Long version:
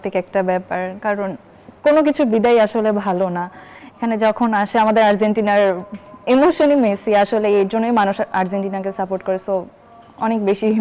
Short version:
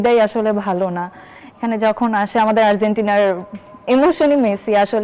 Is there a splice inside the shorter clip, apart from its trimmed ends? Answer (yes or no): no